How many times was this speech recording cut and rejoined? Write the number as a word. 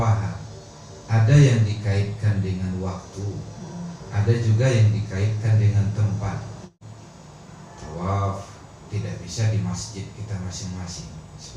one